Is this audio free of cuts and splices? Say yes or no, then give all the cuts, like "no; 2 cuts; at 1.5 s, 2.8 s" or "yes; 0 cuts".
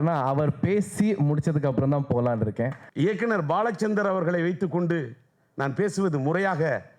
no; 1 cut; at 2.8 s